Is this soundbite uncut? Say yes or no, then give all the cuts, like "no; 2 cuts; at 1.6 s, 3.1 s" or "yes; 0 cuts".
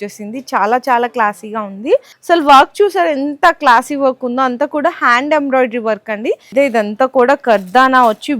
no; 2 cuts; at 2.1 s, 6.4 s